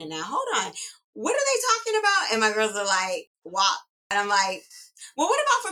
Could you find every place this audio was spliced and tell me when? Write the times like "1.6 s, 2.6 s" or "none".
3.4 s, 4.1 s